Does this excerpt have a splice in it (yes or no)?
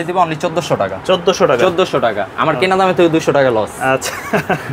no